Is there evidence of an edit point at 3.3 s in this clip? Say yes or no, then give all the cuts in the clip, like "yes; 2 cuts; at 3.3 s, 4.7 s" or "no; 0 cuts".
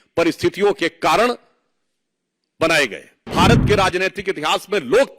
yes; 1 cut; at 3.3 s